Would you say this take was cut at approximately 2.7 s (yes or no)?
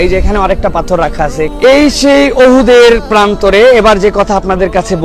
no